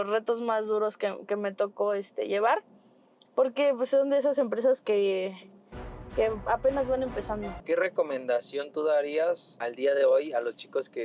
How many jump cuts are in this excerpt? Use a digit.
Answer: 2